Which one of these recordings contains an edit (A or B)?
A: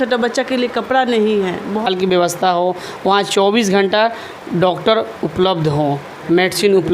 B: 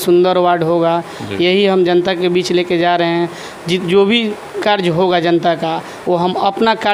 A